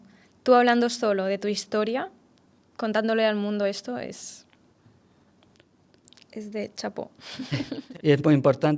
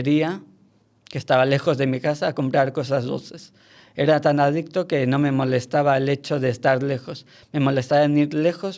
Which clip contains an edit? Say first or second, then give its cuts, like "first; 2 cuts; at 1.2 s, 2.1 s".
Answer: first; 1 cut; at 7.8 s